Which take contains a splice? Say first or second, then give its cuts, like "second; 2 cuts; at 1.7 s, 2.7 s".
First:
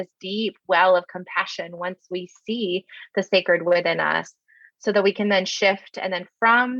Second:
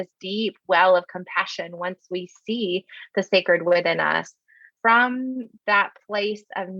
second; 1 cut; at 4.6 s